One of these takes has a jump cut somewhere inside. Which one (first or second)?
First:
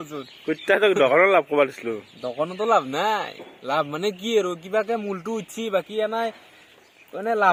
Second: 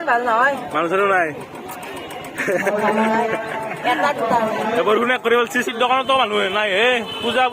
second